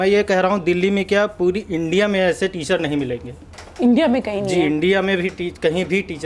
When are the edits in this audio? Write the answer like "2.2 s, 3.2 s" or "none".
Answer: none